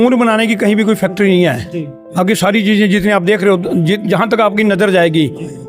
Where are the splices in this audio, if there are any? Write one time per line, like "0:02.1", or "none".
none